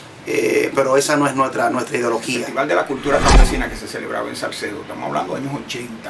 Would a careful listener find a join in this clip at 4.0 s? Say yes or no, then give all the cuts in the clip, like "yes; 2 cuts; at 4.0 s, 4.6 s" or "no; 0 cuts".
no; 1 cut; at 2.5 s